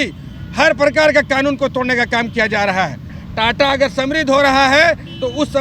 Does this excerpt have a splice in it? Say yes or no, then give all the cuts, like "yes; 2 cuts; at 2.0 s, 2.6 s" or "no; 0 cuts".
yes; 1 cut; at 3.2 s